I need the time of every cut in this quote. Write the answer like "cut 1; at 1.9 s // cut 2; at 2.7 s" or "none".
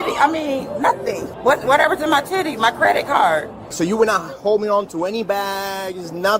cut 1; at 1.3 s